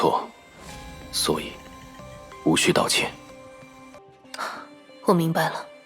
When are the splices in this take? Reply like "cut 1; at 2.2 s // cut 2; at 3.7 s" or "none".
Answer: cut 1; at 3.9 s

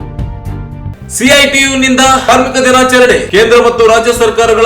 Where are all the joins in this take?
cut 1; at 0.9 s

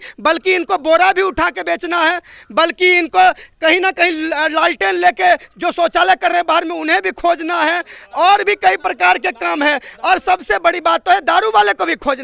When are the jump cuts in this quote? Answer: none

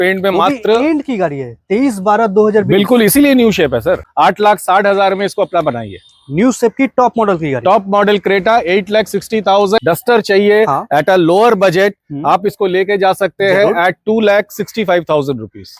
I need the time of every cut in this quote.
cut 1; at 4.1 s // cut 2; at 9.8 s

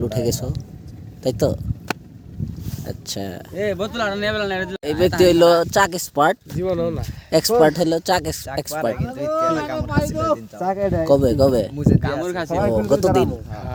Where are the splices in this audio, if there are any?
none

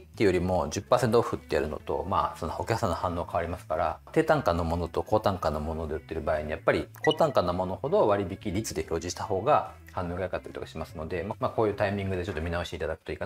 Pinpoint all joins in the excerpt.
none

